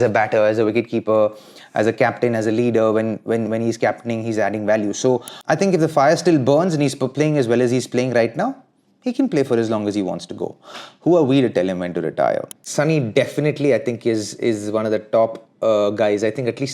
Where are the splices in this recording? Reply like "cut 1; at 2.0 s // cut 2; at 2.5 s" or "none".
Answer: cut 1; at 5.4 s // cut 2; at 12.6 s